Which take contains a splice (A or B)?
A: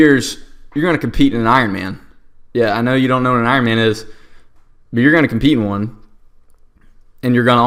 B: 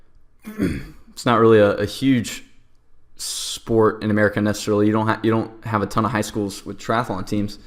B